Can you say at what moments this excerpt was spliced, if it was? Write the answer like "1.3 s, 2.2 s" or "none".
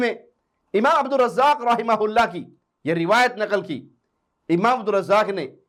none

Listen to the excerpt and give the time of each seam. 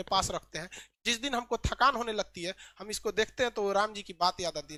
none

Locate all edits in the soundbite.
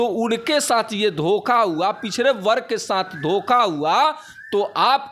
none

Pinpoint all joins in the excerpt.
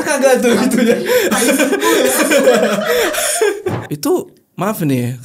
3.8 s

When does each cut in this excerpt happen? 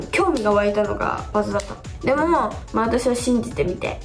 1.8 s, 2.6 s

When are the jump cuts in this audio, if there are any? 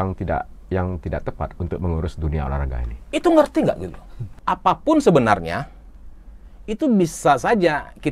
4.3 s

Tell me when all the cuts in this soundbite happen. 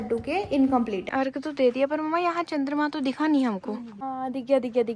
1.1 s, 4.0 s

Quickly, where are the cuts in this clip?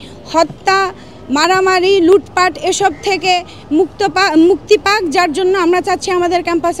none

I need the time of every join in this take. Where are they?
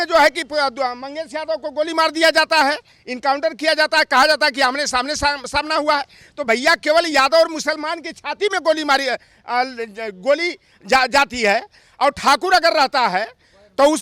none

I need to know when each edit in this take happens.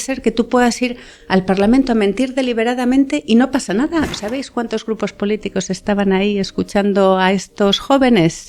4.1 s

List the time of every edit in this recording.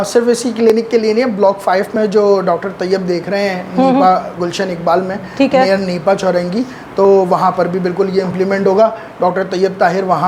none

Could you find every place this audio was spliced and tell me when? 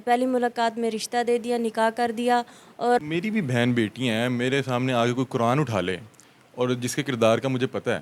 3.0 s

